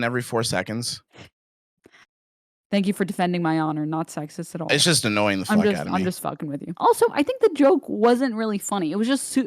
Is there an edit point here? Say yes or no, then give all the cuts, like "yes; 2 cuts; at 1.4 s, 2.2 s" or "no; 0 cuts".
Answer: yes; 1 cut; at 6.7 s